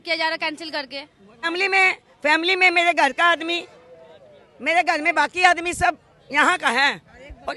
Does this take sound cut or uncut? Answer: cut